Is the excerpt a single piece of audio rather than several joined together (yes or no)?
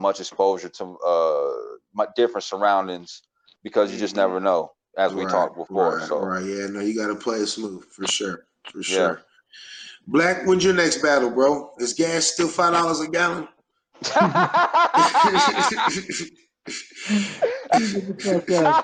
yes